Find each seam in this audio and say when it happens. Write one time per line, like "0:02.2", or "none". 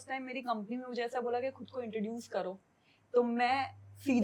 none